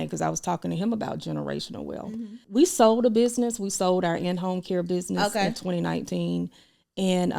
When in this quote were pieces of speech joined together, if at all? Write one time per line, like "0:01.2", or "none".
0:02.4